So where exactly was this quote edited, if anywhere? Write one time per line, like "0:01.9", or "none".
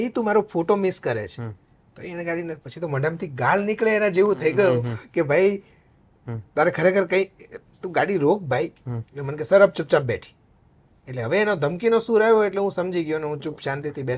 none